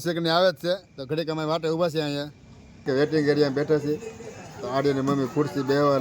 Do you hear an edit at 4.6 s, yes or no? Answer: no